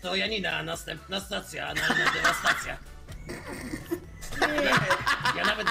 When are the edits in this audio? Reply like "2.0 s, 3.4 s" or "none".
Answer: 4.0 s